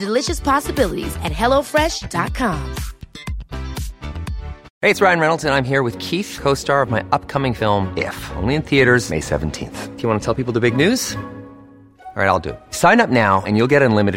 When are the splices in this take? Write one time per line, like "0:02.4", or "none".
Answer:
0:04.6